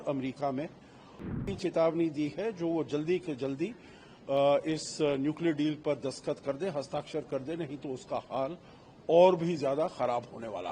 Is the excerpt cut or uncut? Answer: cut